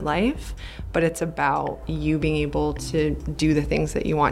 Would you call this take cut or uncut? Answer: cut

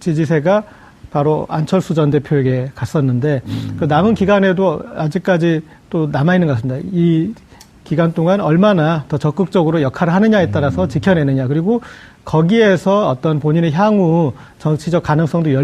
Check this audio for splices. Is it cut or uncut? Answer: cut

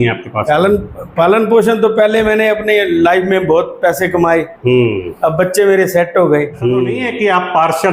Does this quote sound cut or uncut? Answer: cut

